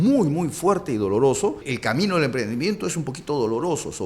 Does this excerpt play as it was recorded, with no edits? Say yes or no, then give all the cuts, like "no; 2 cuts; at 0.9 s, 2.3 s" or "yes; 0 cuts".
no; 1 cut; at 1.7 s